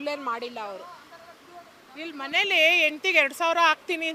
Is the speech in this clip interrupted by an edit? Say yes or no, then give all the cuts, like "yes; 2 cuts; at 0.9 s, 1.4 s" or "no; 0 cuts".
no; 0 cuts